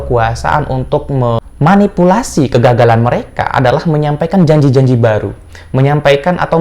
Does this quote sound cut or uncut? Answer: cut